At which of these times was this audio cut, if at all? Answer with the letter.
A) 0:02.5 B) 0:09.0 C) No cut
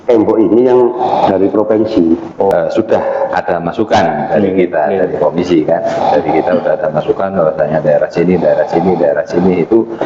A